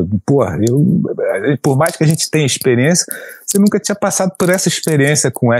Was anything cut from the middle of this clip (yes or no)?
no